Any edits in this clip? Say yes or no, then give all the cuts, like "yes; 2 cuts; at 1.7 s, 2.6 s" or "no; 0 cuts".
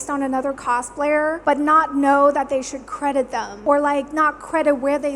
yes; 2 cuts; at 1.4 s, 3.6 s